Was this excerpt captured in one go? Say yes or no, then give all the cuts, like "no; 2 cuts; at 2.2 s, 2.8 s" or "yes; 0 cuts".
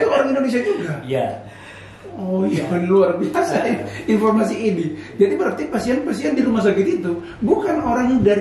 yes; 0 cuts